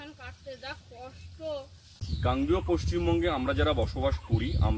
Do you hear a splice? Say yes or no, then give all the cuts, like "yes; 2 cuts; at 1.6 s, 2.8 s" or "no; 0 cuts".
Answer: yes; 1 cut; at 2.2 s